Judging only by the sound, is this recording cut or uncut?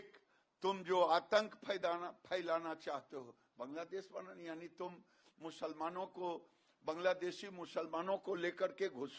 uncut